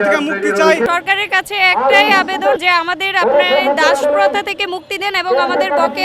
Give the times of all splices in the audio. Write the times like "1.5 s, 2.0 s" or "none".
0.9 s, 2.6 s

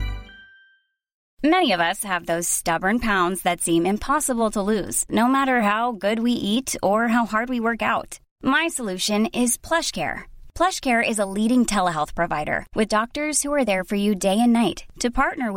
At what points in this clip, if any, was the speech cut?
1.2 s

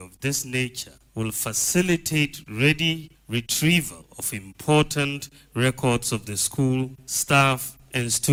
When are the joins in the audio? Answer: none

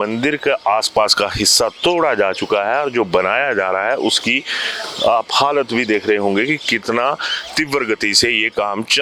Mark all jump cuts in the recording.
none

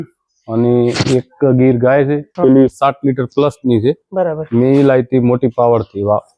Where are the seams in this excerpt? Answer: 2.3 s

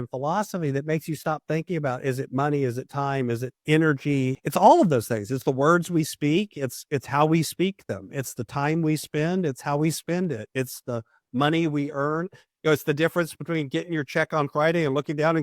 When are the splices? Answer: 3.5 s, 4.4 s

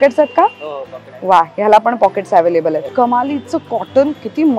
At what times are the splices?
2.9 s

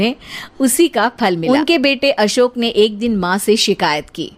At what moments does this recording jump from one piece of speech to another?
1.4 s

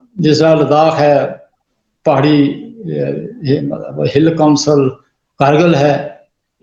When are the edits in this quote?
none

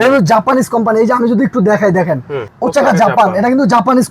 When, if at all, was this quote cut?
none

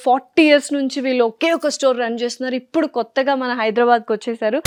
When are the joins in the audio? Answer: none

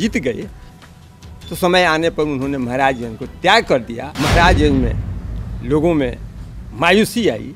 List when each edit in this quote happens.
4.0 s

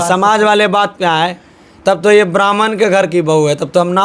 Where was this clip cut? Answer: none

